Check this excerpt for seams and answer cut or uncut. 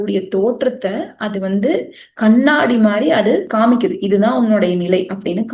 uncut